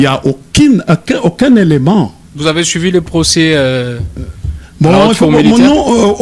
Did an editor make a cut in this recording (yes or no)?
no